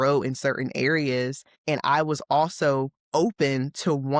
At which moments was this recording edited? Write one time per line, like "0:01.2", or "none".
0:01.5